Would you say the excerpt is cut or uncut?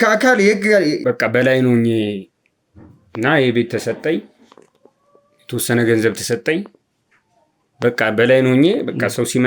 cut